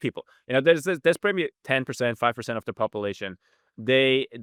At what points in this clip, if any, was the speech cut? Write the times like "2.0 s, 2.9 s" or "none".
none